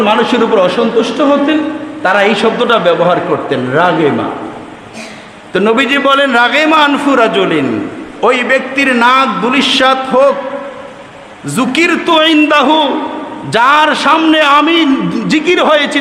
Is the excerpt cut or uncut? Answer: uncut